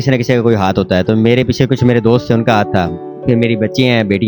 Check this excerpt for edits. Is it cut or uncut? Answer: uncut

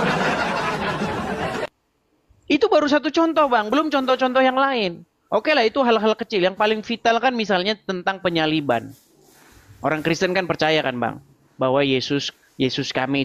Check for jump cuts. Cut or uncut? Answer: cut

